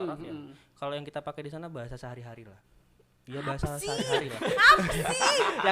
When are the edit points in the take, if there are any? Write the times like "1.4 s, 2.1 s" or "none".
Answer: 2.6 s